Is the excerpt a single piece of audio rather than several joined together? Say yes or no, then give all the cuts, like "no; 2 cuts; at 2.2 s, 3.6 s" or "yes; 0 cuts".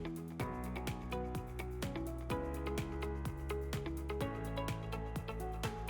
yes; 0 cuts